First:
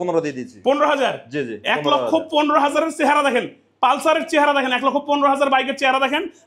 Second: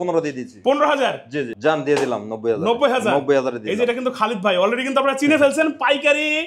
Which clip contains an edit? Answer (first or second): second